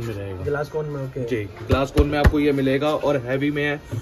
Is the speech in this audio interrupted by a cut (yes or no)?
no